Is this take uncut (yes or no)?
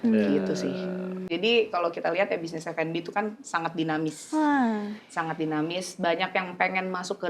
no